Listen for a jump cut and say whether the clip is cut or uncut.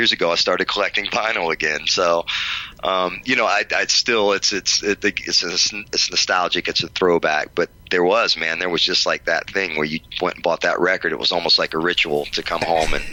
uncut